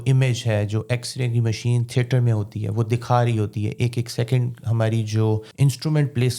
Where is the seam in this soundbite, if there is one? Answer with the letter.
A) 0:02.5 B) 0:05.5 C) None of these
B